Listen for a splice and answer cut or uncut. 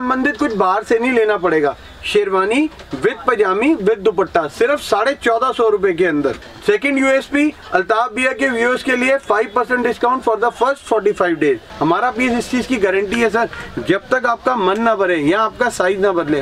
cut